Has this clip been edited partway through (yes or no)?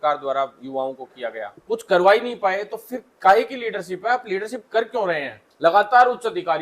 yes